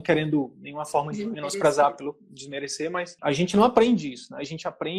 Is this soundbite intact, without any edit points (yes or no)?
no